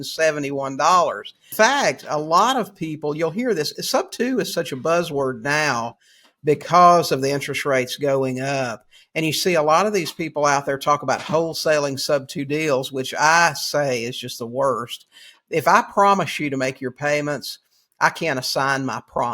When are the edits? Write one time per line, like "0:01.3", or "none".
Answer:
0:01.5